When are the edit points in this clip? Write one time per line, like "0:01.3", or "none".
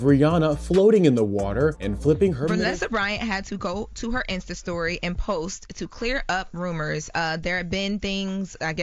0:02.6